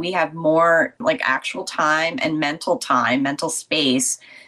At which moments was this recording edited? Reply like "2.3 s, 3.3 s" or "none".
1.0 s